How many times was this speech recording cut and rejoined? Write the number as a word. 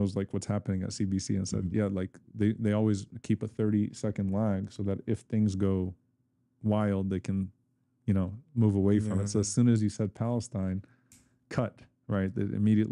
zero